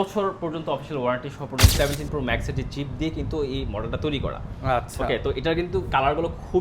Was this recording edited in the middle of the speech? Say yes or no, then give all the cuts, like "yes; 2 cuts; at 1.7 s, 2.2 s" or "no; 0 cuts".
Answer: yes; 1 cut; at 1.7 s